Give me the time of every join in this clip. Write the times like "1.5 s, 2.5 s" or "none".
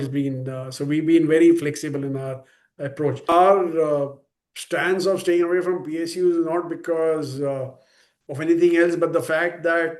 3.2 s